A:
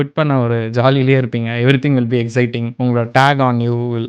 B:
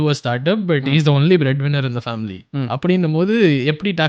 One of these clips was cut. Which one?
A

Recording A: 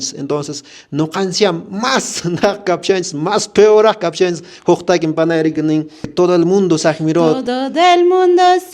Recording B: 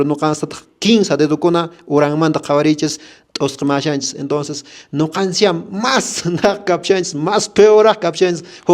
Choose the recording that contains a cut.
A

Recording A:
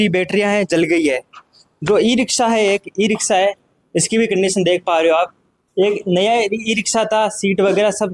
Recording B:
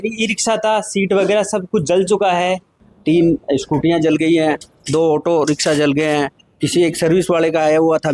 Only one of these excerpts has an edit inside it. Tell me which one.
B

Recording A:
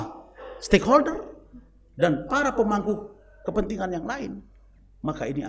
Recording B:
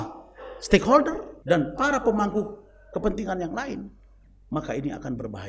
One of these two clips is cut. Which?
B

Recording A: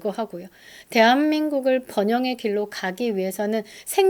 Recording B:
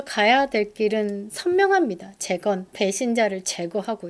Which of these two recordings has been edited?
B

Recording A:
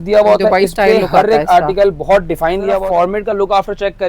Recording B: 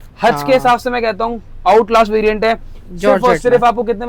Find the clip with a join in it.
A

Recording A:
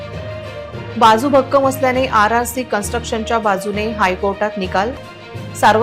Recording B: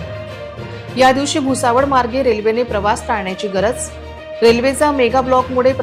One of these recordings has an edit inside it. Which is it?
A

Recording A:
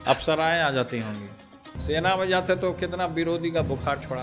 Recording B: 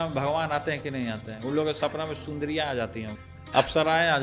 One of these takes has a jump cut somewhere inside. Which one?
A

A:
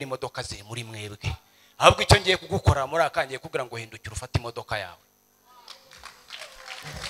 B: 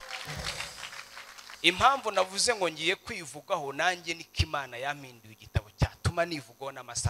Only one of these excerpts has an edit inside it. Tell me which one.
B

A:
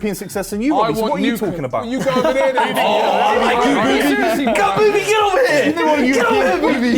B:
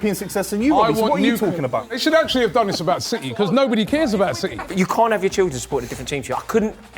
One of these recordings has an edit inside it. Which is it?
B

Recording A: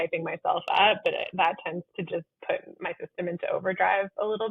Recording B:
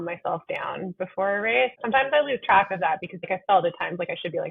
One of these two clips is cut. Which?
B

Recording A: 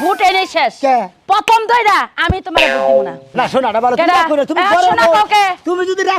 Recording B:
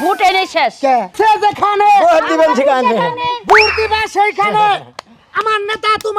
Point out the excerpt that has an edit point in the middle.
B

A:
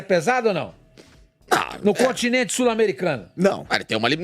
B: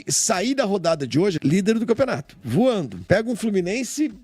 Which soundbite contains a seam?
B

